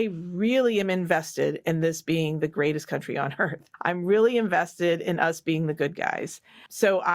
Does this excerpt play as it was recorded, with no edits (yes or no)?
no